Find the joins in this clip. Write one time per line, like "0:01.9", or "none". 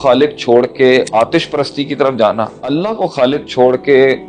0:01.1
0:02.7